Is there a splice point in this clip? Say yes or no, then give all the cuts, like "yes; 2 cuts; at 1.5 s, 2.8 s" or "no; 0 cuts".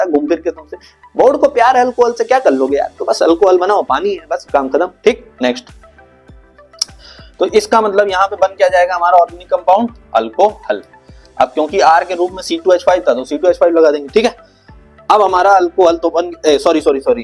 no; 0 cuts